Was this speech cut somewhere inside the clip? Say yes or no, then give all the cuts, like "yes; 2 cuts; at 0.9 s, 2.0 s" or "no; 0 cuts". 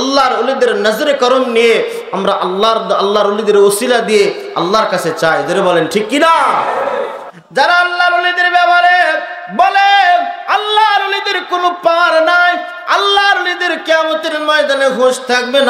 yes; 1 cut; at 7.2 s